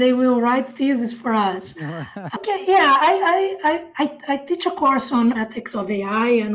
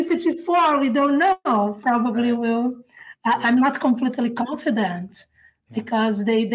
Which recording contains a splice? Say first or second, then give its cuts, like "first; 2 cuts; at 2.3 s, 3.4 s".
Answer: first; 2 cuts; at 2.4 s, 5.4 s